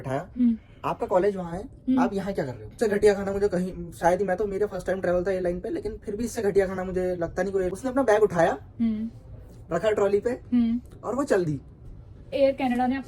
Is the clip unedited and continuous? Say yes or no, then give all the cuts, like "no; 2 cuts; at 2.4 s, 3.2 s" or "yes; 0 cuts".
no; 3 cuts; at 2.7 s, 7.7 s, 12.3 s